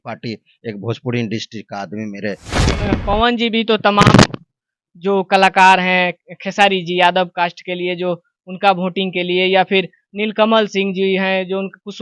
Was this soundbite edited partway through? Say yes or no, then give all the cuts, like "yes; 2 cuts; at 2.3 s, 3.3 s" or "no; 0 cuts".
yes; 1 cut; at 2.8 s